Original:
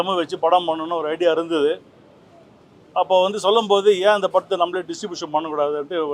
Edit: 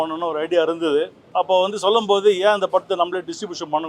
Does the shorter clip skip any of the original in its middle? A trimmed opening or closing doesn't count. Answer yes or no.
yes